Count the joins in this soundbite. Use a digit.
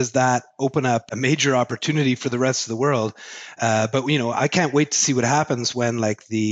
1